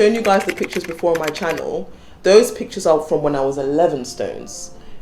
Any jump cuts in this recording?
no; 0 cuts

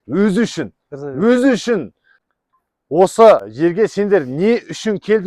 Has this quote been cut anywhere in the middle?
yes; 2 cuts; at 2.2 s, 3.5 s

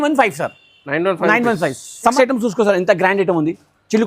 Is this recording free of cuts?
no; 1 cut; at 2.1 s

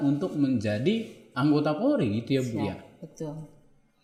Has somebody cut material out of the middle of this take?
no; 0 cuts

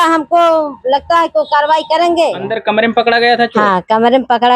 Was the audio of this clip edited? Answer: yes; 1 cut; at 2.5 s

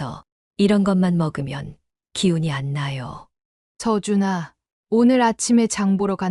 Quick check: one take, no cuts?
yes; 0 cuts

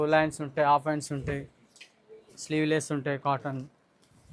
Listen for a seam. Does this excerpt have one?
no; 0 cuts

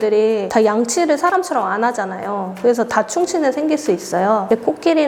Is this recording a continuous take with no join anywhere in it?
yes; 0 cuts

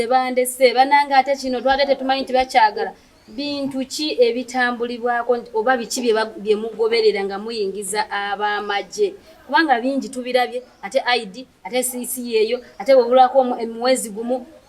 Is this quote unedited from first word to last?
yes; 0 cuts

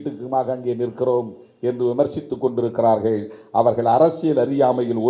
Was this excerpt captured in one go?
yes; 0 cuts

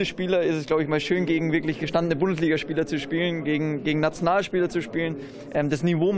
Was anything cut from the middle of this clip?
yes; 1 cut; at 1.3 s

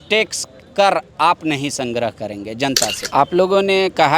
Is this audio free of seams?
no; 1 cut; at 3.0 s

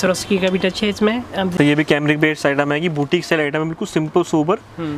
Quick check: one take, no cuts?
no; 1 cut; at 1.5 s

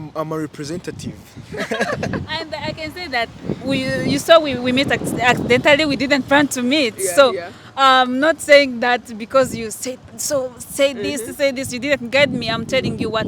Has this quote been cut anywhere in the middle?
no; 0 cuts

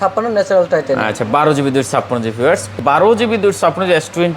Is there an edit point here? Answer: yes; 1 cut; at 2.7 s

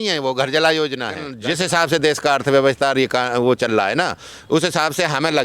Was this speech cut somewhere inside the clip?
yes; 1 cut; at 1.3 s

